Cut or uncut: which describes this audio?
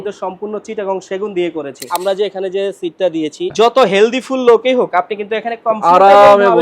cut